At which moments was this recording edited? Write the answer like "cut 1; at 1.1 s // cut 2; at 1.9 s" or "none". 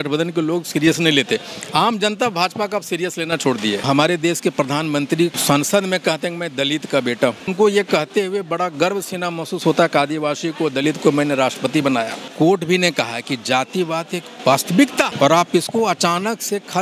cut 1; at 3.9 s // cut 2; at 5.4 s // cut 3; at 7.5 s // cut 4; at 12.3 s // cut 5; at 15.1 s